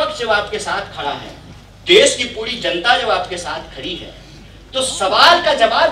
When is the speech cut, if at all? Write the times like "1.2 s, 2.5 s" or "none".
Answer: none